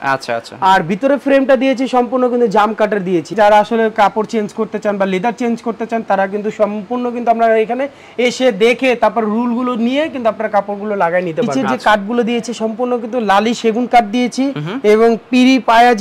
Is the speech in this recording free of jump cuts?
no; 2 cuts; at 3.3 s, 11.5 s

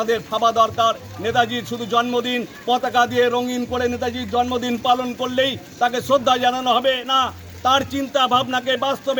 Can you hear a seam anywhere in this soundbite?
no; 0 cuts

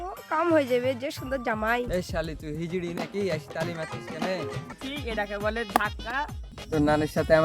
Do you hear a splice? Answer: yes; 2 cuts; at 1.9 s, 4.7 s

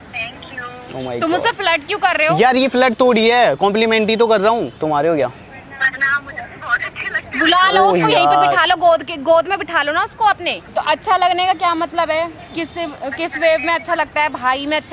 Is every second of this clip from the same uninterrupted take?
no; 2 cuts; at 4.8 s, 10.6 s

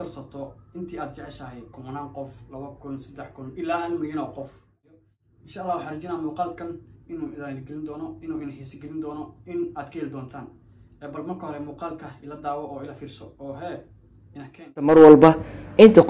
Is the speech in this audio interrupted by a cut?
yes; 2 cuts; at 4.9 s, 14.9 s

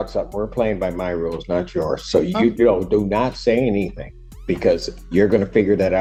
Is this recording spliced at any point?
no; 0 cuts

